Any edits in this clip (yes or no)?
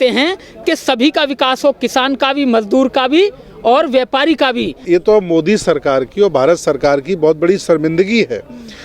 yes